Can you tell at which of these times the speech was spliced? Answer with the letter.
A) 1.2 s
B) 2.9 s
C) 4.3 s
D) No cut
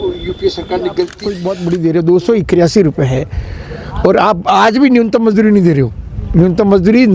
A